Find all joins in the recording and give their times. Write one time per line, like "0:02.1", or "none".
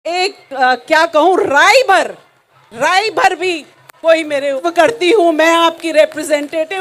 0:04.6